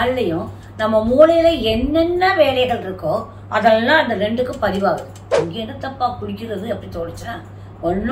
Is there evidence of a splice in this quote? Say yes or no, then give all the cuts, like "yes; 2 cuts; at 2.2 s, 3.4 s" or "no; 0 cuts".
yes; 1 cut; at 5.4 s